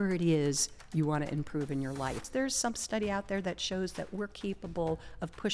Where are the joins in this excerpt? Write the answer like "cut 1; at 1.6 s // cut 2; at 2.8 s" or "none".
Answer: cut 1; at 2.2 s